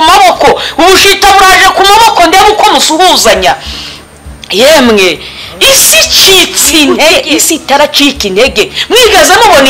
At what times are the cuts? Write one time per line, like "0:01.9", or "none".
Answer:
0:07.1